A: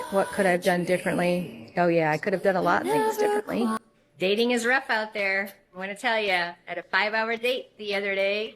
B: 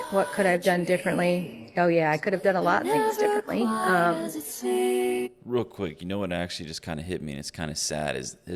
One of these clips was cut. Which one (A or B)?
A